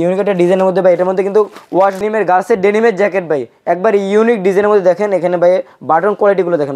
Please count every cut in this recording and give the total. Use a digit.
1